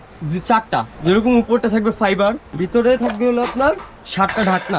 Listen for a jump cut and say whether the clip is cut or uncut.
cut